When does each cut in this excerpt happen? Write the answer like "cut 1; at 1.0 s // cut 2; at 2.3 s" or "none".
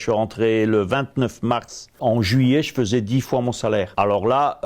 cut 1; at 2.0 s // cut 2; at 3.9 s